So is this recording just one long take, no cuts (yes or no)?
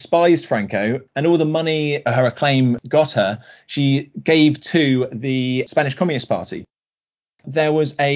no